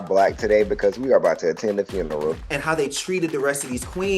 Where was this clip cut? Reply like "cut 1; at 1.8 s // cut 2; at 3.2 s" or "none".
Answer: cut 1; at 2.5 s